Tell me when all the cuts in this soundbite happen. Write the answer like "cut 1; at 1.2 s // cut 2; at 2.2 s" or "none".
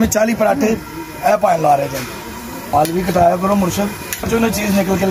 cut 1; at 2.7 s // cut 2; at 4.2 s